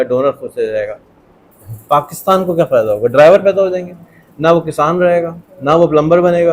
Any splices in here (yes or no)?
no